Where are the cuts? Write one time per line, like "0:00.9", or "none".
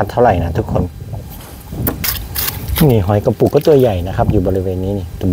0:02.0